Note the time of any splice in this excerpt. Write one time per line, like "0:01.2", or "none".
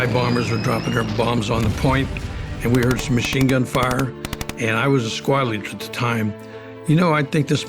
0:01.1
0:06.7